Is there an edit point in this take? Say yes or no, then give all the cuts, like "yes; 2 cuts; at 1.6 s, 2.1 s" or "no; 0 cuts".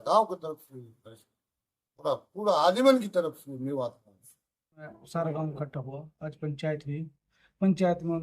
yes; 1 cut; at 5.0 s